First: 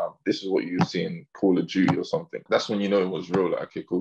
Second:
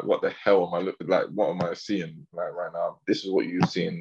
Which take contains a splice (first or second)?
first